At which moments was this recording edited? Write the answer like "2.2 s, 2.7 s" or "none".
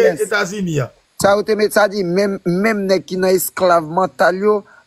none